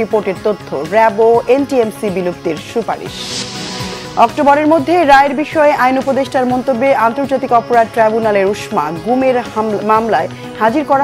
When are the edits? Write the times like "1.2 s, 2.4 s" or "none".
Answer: none